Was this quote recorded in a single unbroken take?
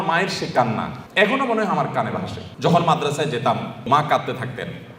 no; 3 cuts; at 1.0 s, 2.4 s, 3.9 s

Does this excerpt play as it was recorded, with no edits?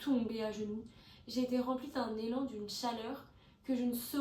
yes; 0 cuts

